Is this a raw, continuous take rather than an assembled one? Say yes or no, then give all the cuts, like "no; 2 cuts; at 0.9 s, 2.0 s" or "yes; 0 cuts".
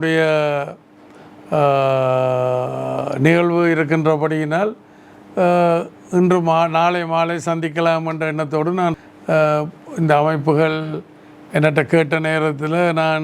no; 1 cut; at 8.9 s